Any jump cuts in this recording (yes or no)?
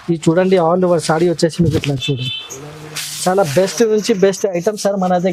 no